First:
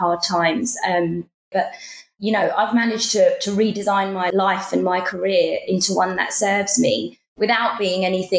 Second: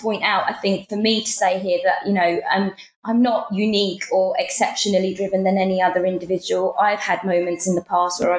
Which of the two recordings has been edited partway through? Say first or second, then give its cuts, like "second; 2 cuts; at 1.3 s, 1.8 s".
first; 1 cut; at 1.5 s